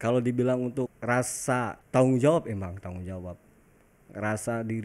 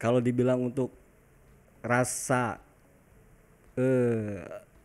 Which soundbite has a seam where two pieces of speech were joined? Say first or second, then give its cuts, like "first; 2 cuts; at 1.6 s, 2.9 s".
first; 2 cuts; at 1.0 s, 1.8 s